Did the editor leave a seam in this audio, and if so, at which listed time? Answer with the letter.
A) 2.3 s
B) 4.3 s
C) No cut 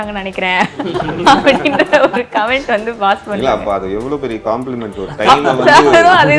C